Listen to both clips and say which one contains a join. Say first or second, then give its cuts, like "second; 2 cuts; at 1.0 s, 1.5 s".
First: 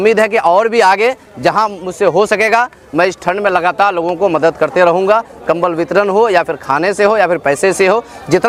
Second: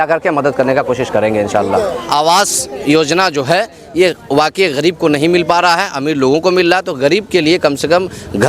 second; 1 cut; at 2.0 s